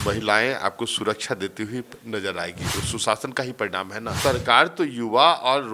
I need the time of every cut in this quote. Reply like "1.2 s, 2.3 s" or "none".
2.8 s, 4.2 s